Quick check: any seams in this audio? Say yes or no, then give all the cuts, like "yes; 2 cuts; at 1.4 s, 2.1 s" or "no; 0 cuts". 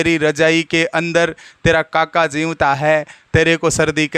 no; 0 cuts